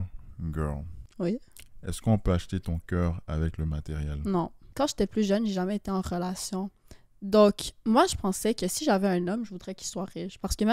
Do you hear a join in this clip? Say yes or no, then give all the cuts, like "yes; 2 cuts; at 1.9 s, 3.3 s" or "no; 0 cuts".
yes; 2 cuts; at 1.0 s, 4.6 s